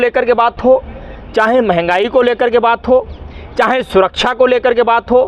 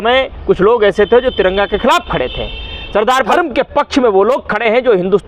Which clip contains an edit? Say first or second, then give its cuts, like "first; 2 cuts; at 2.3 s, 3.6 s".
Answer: second; 1 cut; at 3.3 s